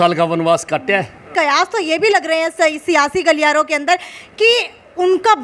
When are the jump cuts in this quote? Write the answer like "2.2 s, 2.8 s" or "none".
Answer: 1.3 s